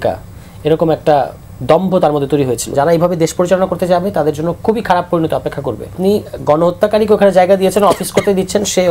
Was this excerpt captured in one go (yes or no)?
no